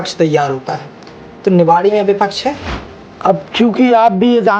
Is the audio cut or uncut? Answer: cut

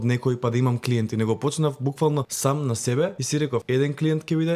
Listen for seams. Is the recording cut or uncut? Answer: cut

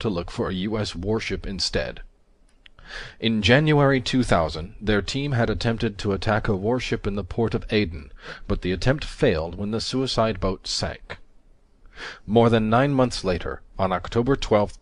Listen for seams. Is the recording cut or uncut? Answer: uncut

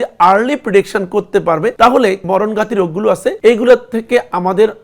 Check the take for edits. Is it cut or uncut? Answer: cut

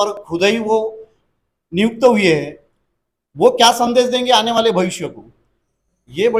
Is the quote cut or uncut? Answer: uncut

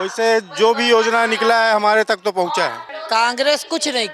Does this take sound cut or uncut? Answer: cut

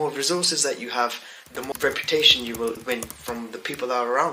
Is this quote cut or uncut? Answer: cut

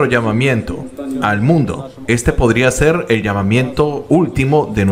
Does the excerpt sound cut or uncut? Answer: uncut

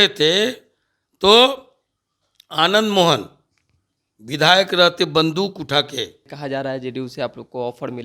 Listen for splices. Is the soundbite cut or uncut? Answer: cut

